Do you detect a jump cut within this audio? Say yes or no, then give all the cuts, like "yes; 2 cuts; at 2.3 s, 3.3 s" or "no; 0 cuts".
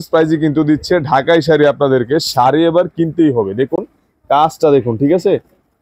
no; 0 cuts